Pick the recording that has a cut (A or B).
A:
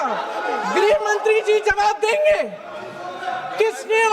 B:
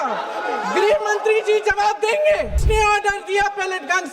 B